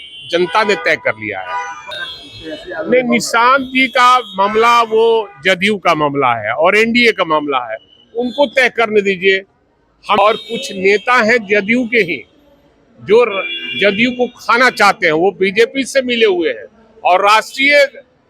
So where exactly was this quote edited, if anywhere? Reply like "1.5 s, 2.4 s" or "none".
2.0 s, 10.2 s